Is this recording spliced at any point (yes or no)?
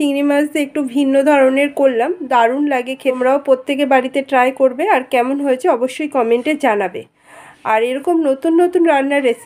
yes